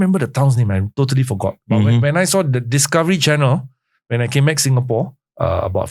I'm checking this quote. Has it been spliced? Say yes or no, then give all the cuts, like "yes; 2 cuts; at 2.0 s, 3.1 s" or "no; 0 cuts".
no; 0 cuts